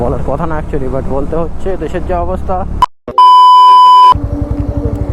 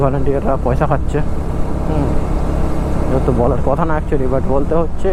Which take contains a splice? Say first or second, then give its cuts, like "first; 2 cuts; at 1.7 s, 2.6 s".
first; 1 cut; at 2.7 s